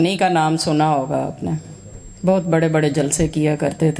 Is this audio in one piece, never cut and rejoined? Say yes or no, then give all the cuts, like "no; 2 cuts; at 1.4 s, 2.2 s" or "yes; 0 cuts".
yes; 0 cuts